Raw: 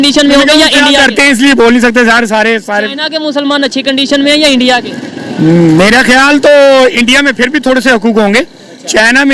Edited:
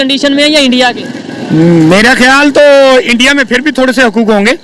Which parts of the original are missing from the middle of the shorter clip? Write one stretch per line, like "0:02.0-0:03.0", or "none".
none